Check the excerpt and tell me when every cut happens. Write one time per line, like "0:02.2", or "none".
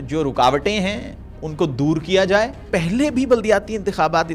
0:02.6